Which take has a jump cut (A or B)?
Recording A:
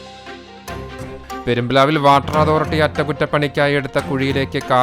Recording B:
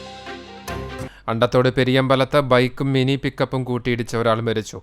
B